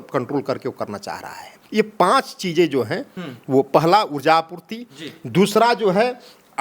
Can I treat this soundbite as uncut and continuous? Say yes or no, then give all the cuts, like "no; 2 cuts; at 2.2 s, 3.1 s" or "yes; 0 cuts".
no; 1 cut; at 1.6 s